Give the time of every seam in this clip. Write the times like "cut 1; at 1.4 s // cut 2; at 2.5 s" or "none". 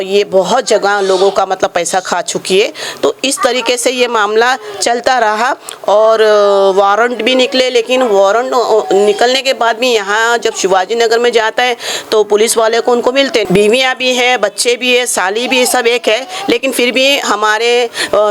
cut 1; at 13.4 s